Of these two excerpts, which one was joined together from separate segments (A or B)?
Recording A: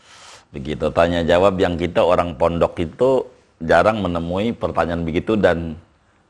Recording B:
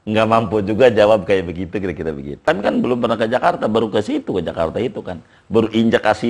B